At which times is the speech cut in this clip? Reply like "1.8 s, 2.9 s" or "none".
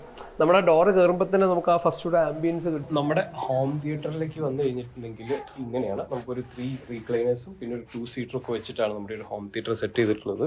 2.8 s